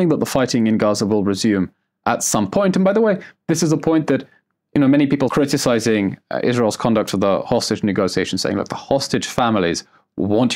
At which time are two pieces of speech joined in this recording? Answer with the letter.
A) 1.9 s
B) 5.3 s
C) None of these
B